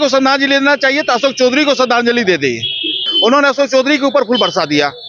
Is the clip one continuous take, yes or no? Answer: no